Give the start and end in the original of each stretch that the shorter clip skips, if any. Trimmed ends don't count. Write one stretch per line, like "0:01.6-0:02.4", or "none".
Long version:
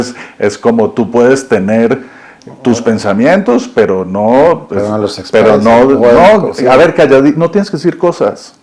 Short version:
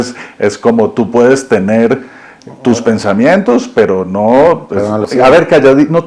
0:05.1-0:06.5